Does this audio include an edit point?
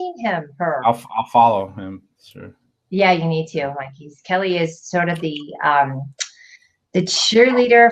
yes; 1 cut; at 1.4 s

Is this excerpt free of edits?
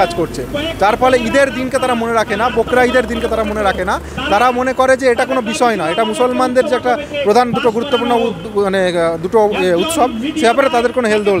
yes; 0 cuts

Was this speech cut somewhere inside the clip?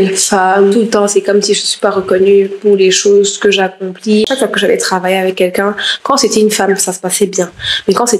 yes; 1 cut; at 4.3 s

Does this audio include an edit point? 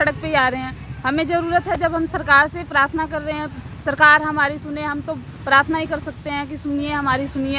no; 0 cuts

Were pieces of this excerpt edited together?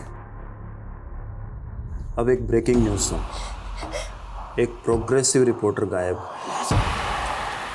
no; 0 cuts

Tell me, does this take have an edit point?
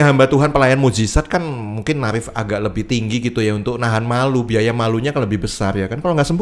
no; 0 cuts

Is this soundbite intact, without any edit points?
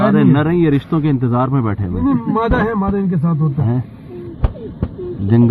yes; 0 cuts

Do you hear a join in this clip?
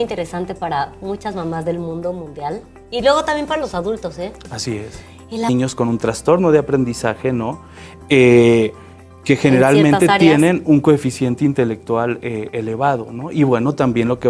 no; 0 cuts

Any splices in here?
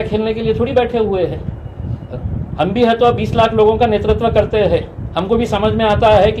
no; 0 cuts

